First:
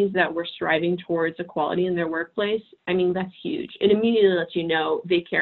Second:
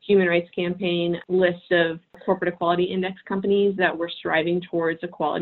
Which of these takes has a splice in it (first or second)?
second